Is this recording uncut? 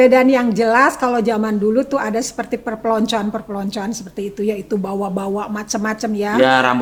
yes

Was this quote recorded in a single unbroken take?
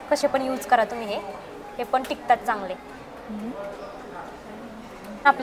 yes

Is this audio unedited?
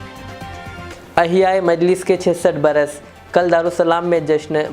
no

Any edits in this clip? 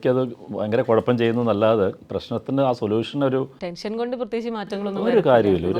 yes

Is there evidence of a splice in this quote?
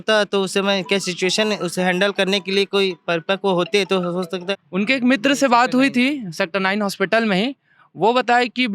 yes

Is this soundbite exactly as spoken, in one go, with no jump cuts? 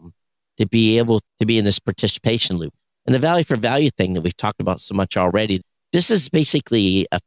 no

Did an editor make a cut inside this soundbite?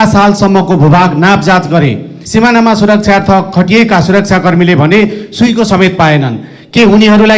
yes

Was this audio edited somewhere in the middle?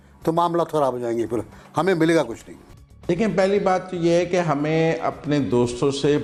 no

